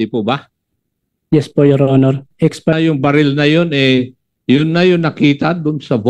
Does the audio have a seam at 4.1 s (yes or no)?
no